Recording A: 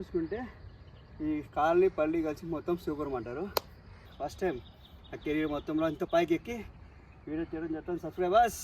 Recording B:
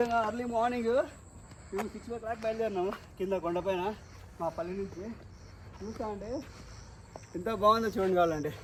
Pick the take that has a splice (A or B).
A